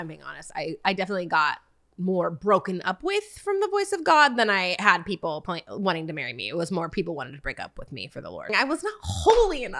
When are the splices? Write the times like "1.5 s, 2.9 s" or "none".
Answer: 5.4 s, 8.5 s